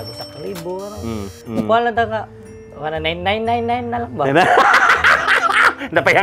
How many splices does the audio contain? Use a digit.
0